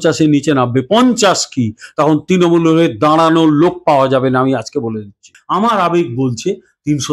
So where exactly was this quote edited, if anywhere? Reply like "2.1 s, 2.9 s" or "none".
5.3 s